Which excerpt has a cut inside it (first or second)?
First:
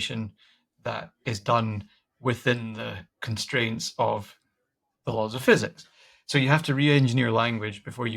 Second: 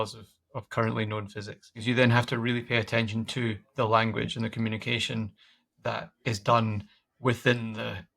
second